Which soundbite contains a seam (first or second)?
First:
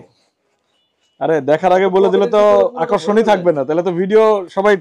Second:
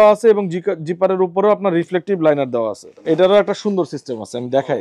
second